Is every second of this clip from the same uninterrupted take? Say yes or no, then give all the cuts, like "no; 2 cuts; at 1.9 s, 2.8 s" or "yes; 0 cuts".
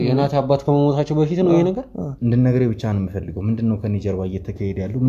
no; 1 cut; at 2.0 s